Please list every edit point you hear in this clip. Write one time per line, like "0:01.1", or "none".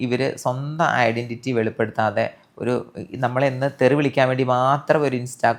none

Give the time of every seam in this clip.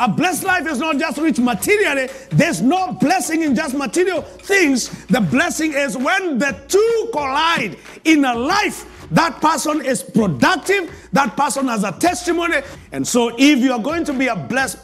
0:12.7

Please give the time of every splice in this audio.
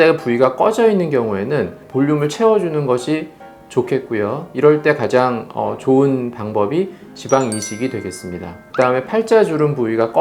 0:01.8

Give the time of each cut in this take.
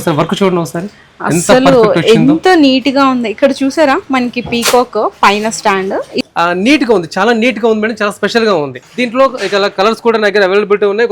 0:06.2
0:08.8

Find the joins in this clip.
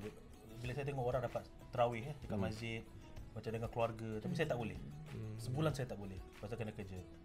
none

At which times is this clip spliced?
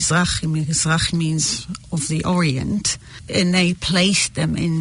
0:03.3

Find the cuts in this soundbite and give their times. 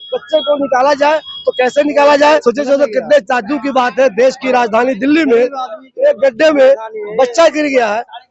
0:02.3

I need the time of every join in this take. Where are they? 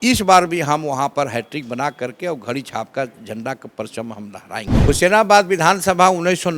0:04.7

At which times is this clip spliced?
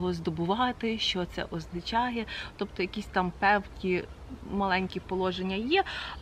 none

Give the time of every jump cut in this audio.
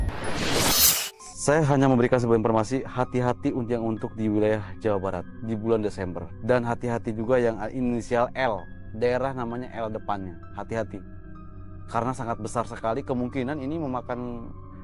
0:01.1

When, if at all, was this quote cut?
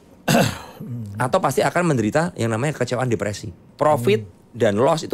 0:03.6

